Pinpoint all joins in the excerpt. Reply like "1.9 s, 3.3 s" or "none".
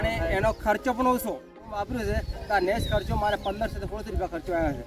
1.7 s